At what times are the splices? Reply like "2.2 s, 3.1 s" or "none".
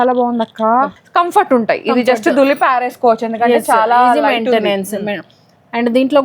0.9 s